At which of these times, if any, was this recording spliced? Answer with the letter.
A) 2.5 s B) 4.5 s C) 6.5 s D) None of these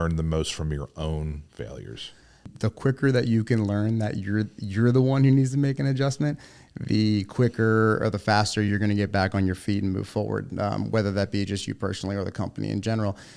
A